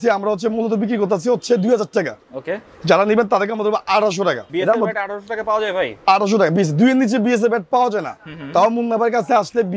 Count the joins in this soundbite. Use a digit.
1